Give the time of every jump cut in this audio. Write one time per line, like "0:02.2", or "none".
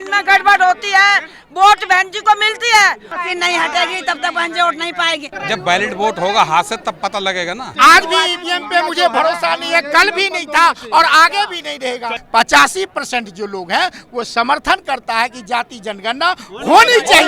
0:03.1
0:05.3
0:07.7
0:12.2